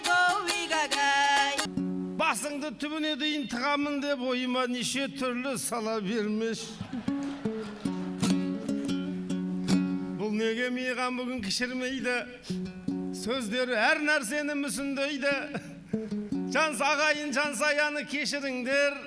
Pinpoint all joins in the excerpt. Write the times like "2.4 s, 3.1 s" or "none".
1.7 s